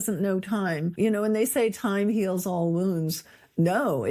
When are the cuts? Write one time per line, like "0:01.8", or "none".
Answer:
0:00.9